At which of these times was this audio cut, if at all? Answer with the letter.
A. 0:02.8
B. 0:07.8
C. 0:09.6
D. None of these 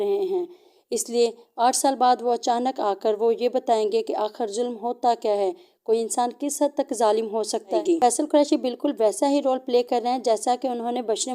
B